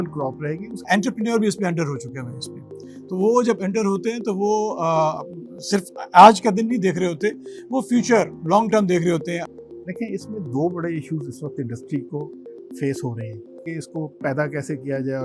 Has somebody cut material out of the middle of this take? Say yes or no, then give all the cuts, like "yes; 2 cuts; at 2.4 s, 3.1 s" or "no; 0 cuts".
yes; 3 cuts; at 0.8 s, 9.5 s, 13.6 s